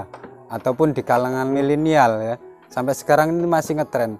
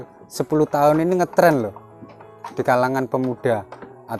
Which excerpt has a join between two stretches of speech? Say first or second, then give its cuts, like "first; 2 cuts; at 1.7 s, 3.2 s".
first; 1 cut; at 1.5 s